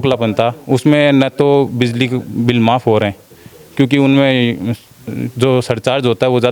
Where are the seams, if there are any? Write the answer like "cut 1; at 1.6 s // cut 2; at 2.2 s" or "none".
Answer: none

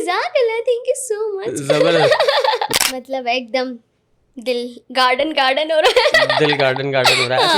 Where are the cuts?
cut 1; at 2.7 s

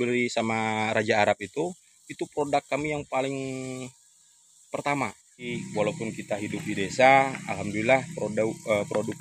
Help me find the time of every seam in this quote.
cut 1; at 5.5 s

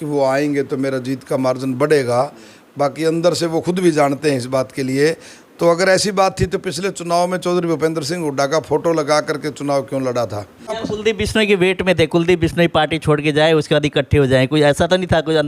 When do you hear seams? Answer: cut 1; at 10.8 s

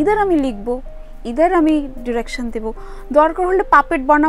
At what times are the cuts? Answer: none

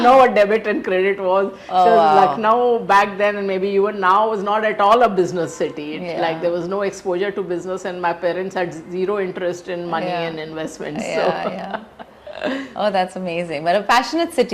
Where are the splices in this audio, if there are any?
none

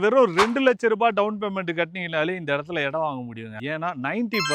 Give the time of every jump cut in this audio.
none

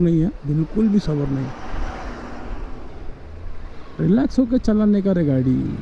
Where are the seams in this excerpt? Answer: none

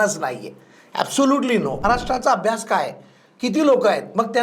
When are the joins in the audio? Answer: cut 1; at 1.8 s

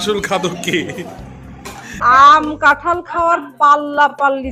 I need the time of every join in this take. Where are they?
cut 1; at 1.9 s

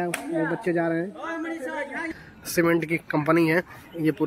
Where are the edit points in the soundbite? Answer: cut 1; at 2.1 s

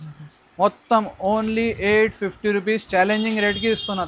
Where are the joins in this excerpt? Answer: none

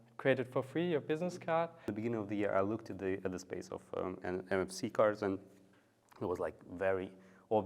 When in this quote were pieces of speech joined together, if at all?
cut 1; at 1.9 s

